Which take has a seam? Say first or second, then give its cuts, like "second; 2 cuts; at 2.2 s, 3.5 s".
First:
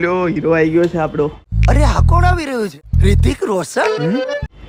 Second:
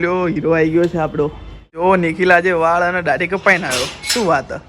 second; 1 cut; at 1.5 s